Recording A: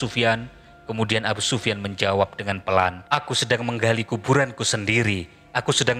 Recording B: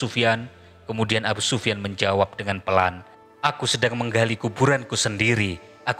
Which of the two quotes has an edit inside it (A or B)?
A